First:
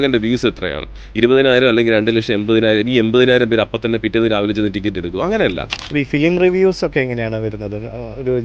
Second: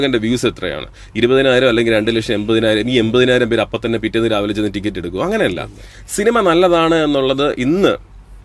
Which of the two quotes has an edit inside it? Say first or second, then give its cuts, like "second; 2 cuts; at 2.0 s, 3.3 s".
first; 1 cut; at 5.8 s